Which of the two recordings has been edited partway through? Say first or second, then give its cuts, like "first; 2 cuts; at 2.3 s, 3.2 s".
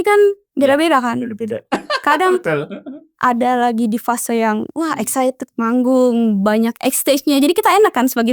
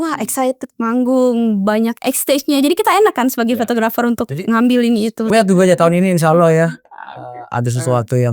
second; 1 cut; at 5.3 s